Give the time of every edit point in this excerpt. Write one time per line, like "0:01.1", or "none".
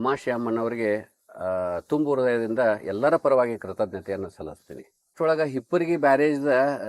0:05.1